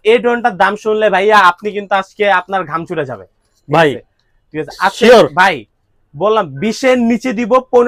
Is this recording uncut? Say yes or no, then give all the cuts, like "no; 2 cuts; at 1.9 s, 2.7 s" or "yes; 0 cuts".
yes; 0 cuts